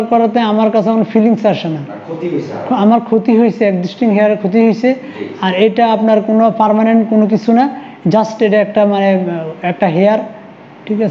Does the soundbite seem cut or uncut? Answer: uncut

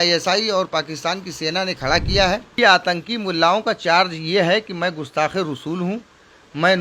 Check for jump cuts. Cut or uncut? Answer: cut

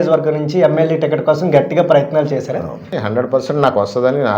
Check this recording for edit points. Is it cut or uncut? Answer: cut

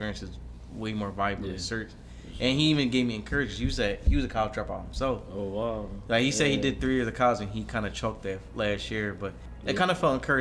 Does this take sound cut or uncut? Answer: cut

